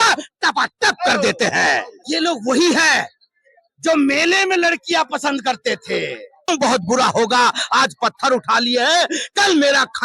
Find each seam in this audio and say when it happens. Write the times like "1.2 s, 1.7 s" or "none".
1.9 s, 6.5 s